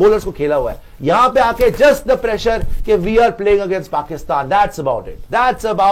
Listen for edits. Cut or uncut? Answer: uncut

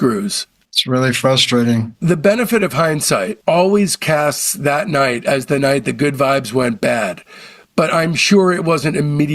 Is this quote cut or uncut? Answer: cut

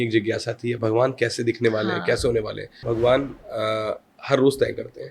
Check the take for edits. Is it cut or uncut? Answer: cut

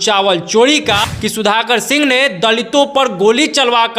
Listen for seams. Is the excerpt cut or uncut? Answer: cut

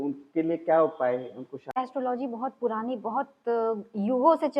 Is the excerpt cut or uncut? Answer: cut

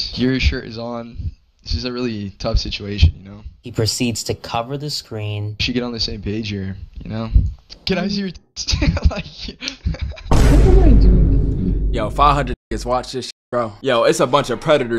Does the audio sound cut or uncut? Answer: uncut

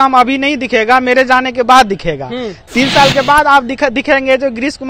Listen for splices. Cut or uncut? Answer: uncut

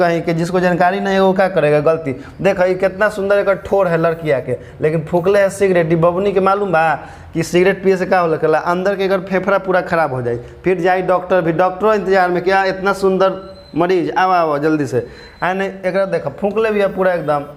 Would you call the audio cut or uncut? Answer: uncut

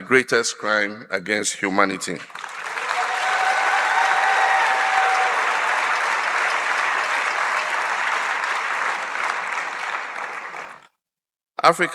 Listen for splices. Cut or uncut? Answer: cut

